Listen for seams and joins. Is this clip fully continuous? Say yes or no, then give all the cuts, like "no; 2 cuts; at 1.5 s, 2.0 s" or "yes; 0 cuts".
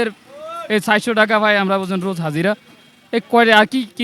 yes; 0 cuts